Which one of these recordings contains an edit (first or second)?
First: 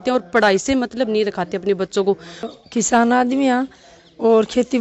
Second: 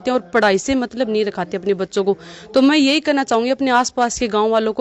first